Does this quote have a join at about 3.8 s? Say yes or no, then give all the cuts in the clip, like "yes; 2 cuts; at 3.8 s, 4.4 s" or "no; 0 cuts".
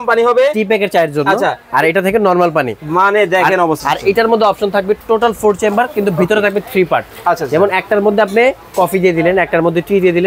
yes; 1 cut; at 3.8 s